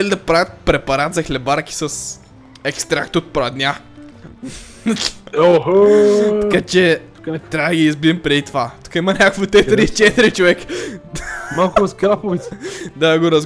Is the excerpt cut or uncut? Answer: uncut